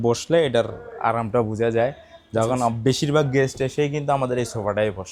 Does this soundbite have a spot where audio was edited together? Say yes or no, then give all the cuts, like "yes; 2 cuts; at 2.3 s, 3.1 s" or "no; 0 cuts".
no; 0 cuts